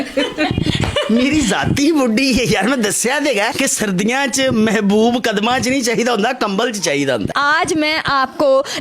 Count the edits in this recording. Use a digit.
1